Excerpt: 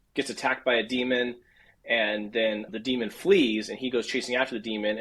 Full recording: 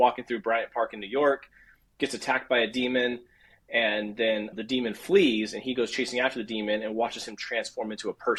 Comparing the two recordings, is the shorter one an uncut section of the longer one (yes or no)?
yes